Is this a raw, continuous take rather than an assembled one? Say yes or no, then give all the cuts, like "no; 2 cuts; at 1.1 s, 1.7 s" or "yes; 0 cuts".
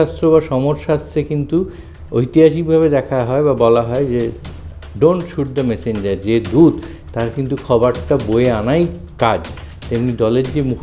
yes; 0 cuts